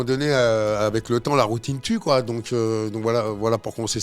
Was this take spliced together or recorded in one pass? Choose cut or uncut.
uncut